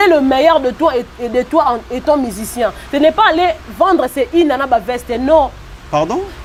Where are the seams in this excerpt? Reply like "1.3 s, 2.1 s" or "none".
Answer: none

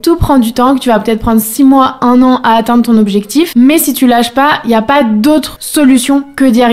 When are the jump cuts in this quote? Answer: 5.6 s

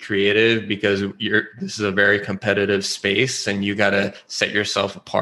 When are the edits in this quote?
none

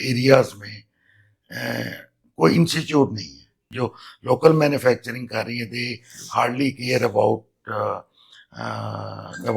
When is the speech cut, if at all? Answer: 3.6 s

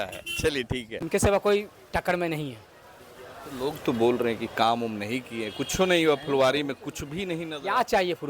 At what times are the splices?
0.9 s

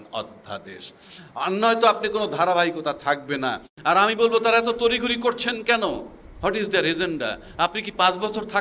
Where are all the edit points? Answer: 3.7 s

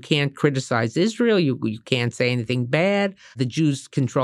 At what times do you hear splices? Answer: 3.3 s

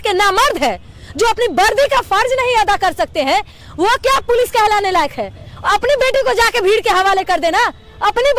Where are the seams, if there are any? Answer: none

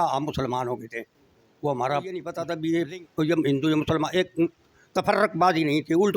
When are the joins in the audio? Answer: 2.4 s

